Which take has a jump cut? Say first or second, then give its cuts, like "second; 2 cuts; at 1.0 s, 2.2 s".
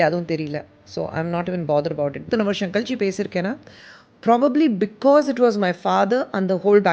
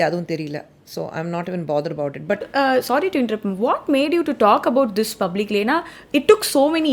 first; 1 cut; at 2.2 s